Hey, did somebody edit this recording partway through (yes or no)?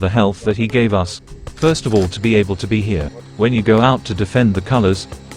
yes